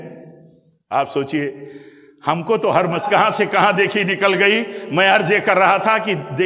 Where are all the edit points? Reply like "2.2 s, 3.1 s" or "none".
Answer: 3.0 s